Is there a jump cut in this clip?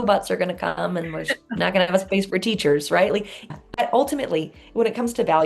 yes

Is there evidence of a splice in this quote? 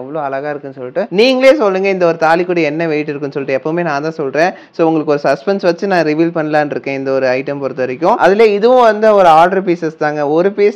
yes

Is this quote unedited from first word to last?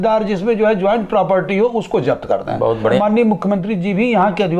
no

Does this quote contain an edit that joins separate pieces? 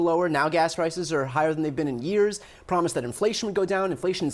no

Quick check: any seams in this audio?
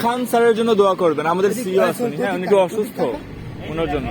no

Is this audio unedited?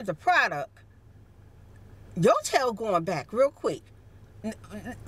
yes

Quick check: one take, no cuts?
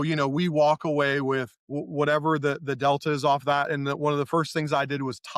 yes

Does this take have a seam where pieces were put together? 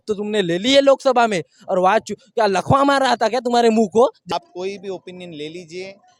yes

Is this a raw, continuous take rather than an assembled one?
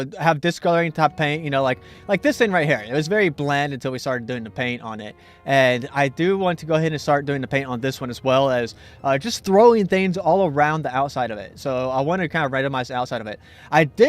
no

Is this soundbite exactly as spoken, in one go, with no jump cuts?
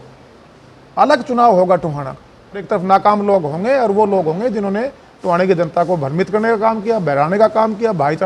no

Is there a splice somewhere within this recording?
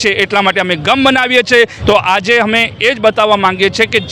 yes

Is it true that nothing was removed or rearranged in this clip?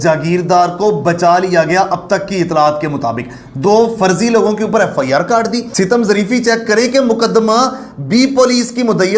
no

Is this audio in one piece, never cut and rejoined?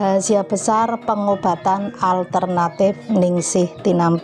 yes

